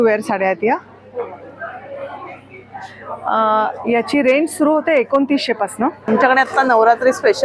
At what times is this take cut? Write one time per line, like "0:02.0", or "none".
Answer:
0:06.1